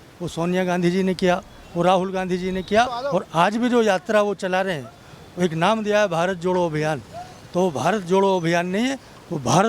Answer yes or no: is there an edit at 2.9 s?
yes